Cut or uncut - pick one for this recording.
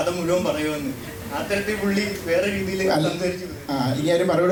uncut